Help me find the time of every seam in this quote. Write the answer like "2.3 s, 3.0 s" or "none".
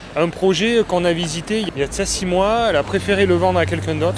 none